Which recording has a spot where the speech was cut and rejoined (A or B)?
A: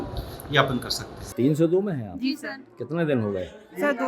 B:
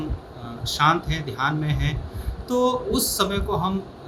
A